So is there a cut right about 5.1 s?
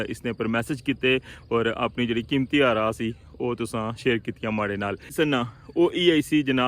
yes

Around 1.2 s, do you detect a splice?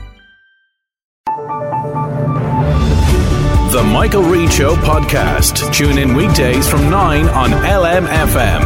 yes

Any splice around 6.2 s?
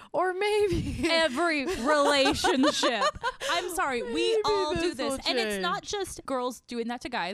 yes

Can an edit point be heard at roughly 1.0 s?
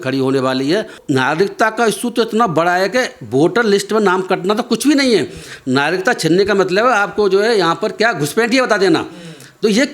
yes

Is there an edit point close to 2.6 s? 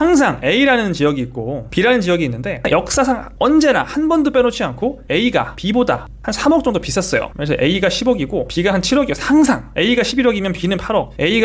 yes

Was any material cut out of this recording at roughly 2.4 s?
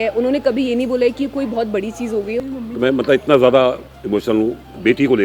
yes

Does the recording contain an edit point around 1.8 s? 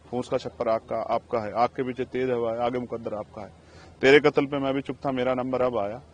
no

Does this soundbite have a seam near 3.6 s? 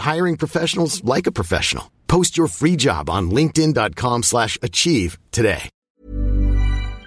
no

